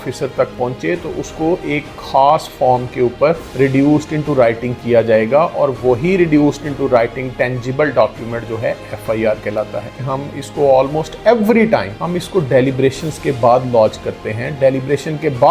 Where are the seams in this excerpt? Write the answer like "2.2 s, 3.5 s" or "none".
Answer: 10.0 s, 12.0 s